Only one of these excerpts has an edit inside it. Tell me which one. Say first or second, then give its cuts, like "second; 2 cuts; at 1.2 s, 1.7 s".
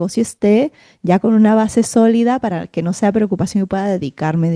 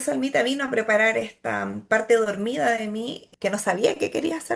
second; 1 cut; at 3.3 s